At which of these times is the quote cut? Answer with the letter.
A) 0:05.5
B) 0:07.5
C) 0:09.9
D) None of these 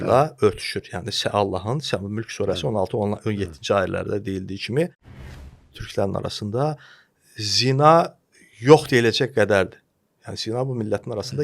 A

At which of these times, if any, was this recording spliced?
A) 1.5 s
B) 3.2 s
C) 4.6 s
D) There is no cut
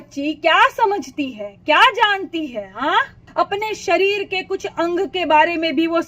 B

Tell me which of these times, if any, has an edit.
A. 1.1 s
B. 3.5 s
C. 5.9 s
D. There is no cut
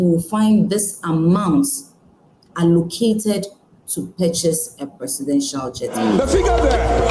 C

